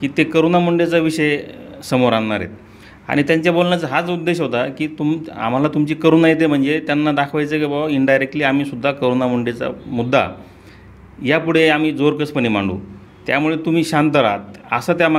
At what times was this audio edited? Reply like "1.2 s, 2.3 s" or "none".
none